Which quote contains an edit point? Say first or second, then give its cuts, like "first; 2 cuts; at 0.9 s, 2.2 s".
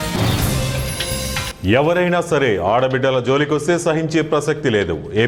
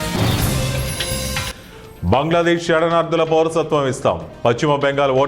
second; 1 cut; at 1.5 s